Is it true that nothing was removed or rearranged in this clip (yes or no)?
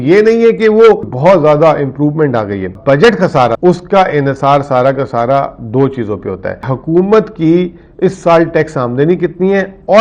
no